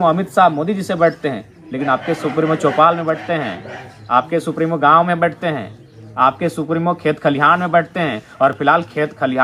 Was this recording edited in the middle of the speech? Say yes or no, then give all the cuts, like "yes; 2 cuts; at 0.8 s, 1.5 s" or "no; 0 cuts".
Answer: no; 0 cuts